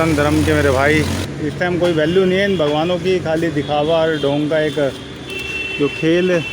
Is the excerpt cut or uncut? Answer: cut